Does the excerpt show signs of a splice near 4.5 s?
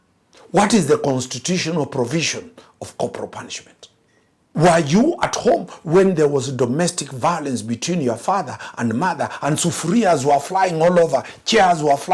yes; 1 cut; at 4.5 s

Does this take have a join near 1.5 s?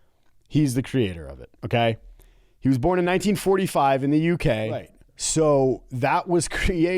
no; 1 cut; at 5.0 s

